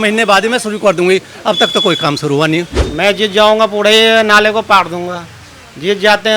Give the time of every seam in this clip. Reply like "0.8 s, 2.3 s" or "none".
2.8 s